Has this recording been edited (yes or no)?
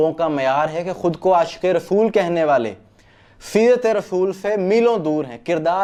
no